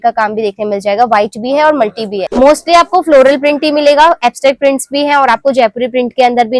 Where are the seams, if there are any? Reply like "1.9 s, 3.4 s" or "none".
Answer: 2.2 s